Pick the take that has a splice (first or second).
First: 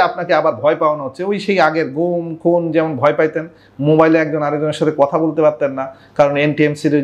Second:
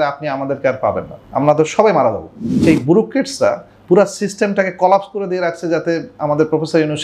second